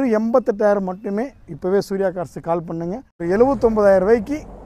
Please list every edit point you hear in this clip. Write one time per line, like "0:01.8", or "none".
0:03.1